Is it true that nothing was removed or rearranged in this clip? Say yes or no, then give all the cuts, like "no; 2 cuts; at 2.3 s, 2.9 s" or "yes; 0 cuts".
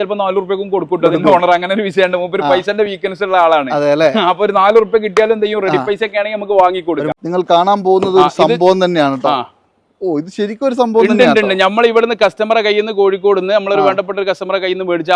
no; 1 cut; at 7.1 s